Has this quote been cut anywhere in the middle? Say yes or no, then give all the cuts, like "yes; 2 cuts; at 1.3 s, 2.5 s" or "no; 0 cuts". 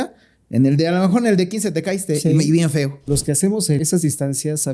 yes; 2 cuts; at 3.0 s, 3.8 s